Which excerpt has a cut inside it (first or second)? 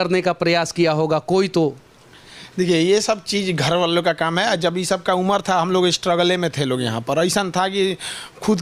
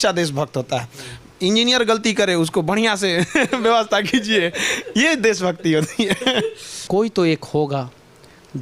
second